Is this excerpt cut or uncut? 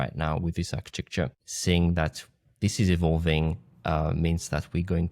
cut